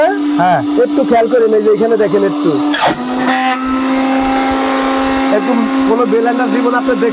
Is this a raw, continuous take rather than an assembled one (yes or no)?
yes